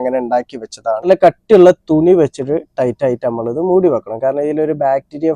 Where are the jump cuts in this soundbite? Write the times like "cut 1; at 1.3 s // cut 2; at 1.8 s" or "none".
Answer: cut 1; at 1.1 s